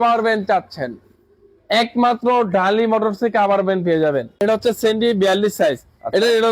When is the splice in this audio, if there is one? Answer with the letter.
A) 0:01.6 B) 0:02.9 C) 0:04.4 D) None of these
C